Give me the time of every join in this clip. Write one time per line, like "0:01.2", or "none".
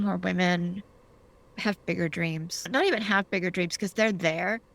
0:02.7